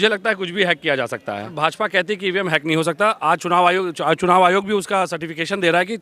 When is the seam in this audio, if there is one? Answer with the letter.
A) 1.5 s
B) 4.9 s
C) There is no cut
A